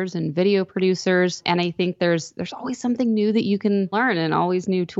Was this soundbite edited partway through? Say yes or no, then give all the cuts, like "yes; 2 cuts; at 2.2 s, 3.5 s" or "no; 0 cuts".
yes; 2 cuts; at 1.4 s, 3.9 s